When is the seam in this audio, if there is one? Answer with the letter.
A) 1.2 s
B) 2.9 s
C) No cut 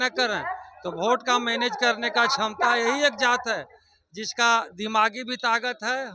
C